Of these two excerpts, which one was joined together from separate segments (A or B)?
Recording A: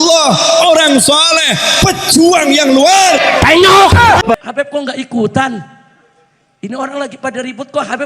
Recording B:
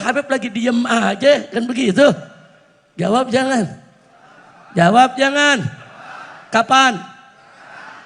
A